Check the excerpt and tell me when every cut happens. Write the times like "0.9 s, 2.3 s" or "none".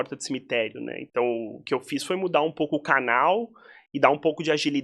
none